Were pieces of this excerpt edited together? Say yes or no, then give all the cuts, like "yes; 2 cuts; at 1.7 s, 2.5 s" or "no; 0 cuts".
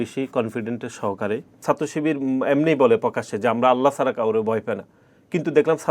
yes; 1 cut; at 1.6 s